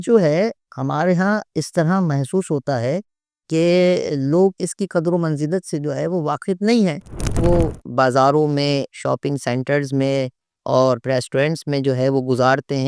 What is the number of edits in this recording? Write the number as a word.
one